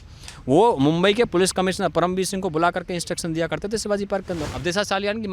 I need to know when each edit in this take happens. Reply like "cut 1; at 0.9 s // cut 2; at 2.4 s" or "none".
cut 1; at 4.4 s